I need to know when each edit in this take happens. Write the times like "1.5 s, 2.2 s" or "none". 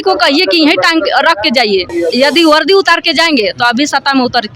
1.9 s